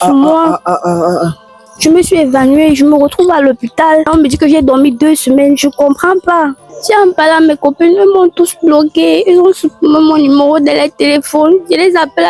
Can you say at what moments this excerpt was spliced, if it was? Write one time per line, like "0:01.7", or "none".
0:01.6
0:04.1
0:06.7